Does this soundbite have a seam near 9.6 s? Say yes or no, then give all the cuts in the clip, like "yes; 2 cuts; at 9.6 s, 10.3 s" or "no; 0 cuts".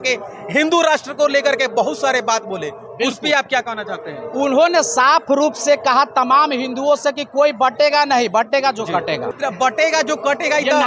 yes; 1 cut; at 9.6 s